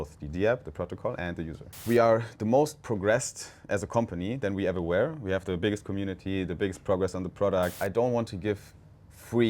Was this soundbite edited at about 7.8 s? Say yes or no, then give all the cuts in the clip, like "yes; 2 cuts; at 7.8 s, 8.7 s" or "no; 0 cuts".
yes; 2 cuts; at 1.8 s, 7.8 s